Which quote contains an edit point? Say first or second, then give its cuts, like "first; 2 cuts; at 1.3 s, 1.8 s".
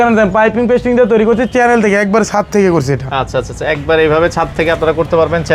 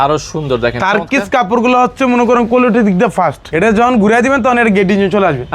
second; 1 cut; at 3.4 s